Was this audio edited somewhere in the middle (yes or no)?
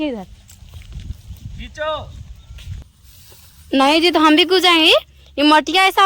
yes